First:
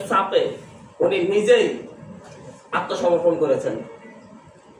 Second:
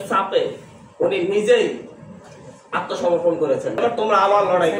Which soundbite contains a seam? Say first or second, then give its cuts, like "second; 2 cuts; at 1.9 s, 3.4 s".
second; 1 cut; at 3.8 s